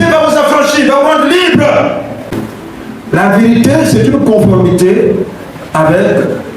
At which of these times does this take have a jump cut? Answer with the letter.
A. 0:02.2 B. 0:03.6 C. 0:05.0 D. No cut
A